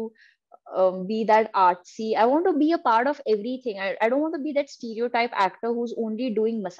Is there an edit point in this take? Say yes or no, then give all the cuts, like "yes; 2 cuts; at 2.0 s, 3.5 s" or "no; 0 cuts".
no; 0 cuts